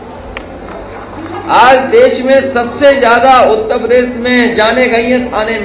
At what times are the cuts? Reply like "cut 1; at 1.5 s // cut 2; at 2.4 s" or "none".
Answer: cut 1; at 1.4 s